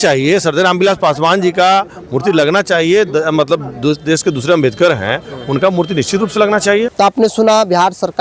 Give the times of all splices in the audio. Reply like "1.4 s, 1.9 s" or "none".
none

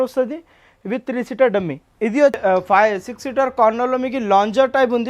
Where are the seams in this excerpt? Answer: 2.4 s

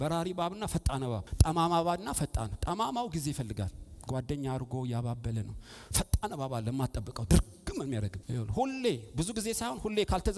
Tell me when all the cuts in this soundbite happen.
1.3 s, 8.2 s

